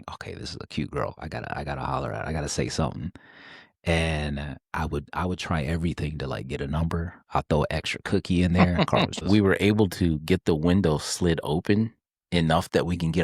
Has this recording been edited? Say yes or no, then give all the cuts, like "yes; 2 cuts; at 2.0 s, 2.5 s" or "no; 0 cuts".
yes; 1 cut; at 9.2 s